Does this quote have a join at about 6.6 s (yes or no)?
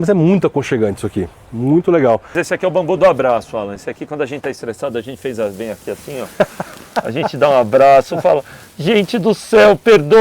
no